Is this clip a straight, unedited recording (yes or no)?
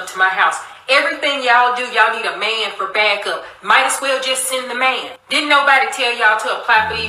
yes